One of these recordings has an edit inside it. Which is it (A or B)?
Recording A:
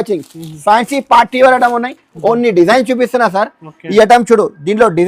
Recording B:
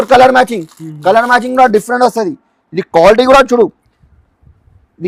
A